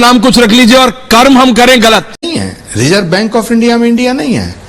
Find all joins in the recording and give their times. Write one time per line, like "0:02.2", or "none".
0:02.3